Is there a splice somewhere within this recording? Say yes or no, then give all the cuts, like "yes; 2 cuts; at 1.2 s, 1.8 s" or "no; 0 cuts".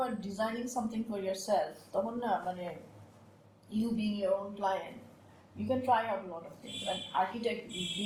no; 0 cuts